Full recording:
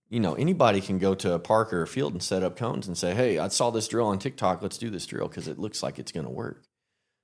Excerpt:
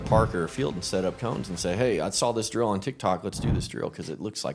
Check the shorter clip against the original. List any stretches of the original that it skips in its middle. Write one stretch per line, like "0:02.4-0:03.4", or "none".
none